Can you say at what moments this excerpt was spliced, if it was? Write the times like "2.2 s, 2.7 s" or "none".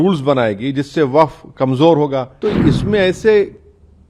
2.3 s

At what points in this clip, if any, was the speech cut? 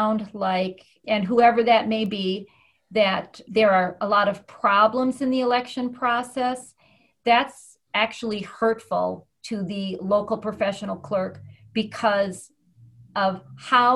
none

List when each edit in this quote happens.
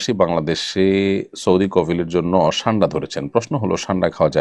none

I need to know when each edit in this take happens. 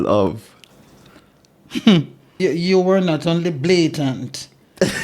2.3 s

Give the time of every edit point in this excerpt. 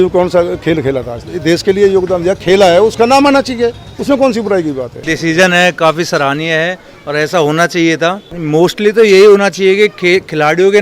1.3 s, 5.0 s, 8.3 s

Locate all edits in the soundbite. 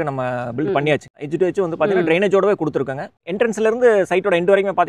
1.2 s, 3.2 s

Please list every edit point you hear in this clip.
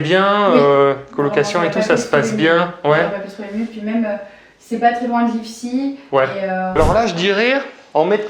6.7 s

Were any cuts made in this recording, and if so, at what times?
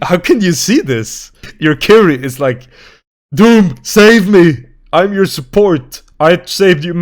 1.5 s

